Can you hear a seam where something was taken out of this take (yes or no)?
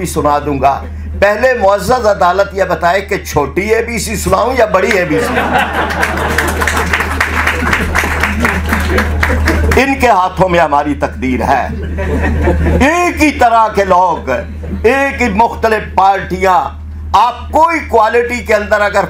no